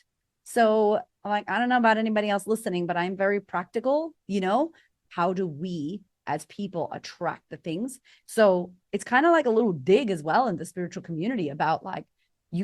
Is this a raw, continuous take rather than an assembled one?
no; 1 cut; at 4.9 s

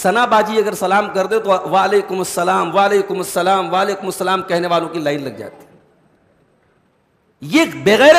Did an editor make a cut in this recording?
no; 0 cuts

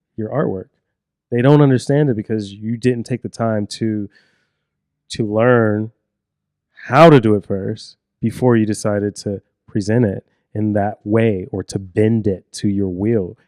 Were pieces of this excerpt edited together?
no; 0 cuts

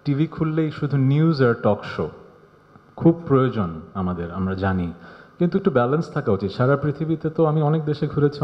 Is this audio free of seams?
yes; 0 cuts

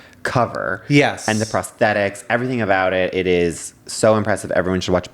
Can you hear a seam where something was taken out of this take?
no; 0 cuts

